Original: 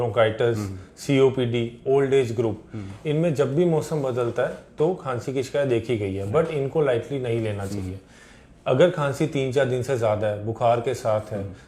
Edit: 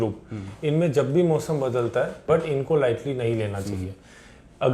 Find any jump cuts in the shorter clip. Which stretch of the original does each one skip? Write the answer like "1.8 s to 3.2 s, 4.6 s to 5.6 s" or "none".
4.6 s to 6.2 s